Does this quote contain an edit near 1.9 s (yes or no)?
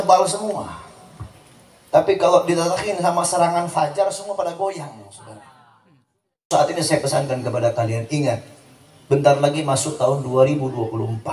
no